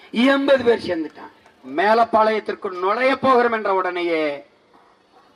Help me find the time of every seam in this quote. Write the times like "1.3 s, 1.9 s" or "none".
1.7 s

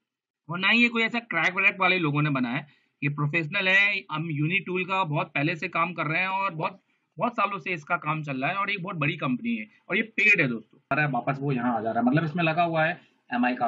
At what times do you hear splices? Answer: 10.9 s

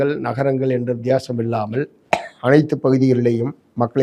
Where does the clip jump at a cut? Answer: none

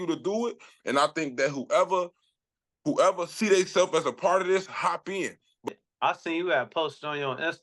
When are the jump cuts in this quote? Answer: 5.7 s

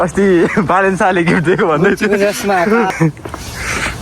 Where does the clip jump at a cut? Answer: 2.9 s

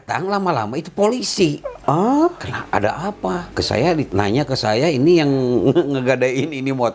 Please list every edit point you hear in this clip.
1.7 s, 2.5 s, 4.0 s

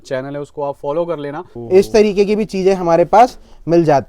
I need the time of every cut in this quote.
1.5 s

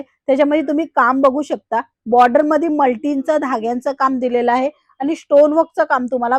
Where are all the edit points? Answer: none

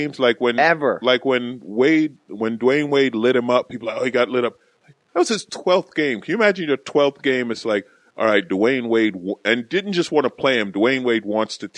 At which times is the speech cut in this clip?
7.6 s

